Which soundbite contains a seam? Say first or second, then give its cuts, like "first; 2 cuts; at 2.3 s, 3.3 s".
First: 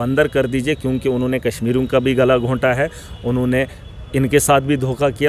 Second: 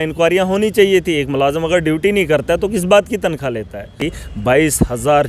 second; 1 cut; at 4.0 s